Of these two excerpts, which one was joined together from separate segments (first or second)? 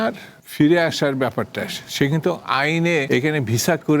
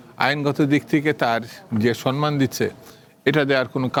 first